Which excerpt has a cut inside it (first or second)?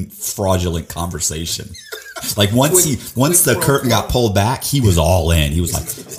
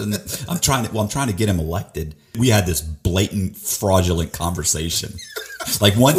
second